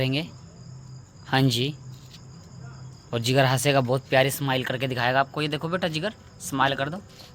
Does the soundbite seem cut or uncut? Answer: uncut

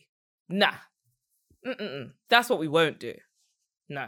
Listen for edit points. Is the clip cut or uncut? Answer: cut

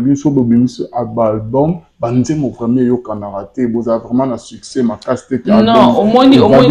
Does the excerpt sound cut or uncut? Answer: uncut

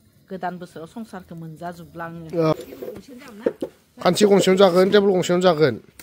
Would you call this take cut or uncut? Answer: cut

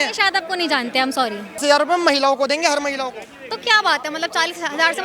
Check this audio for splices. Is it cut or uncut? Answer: cut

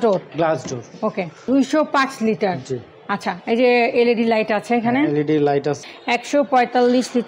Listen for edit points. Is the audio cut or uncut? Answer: cut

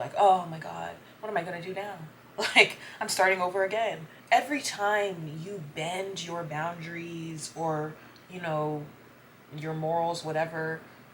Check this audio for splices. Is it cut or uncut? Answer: cut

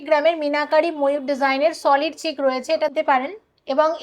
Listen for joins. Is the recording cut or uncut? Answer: cut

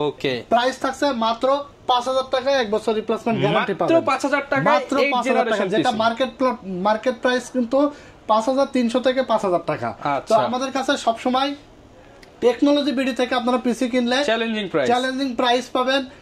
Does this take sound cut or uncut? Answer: uncut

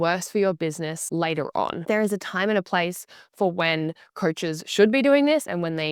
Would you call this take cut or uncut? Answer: cut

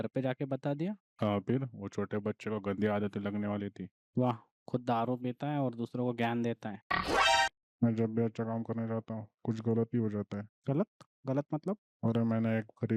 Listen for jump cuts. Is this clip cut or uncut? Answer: cut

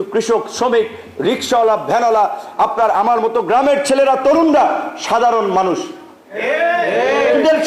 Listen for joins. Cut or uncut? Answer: uncut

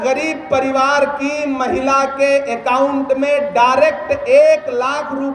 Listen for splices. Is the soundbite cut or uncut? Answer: uncut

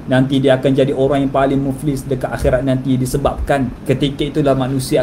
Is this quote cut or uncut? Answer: cut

